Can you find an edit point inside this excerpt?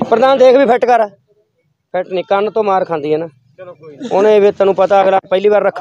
no; 0 cuts

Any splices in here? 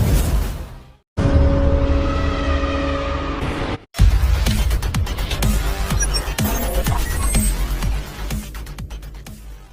no; 0 cuts

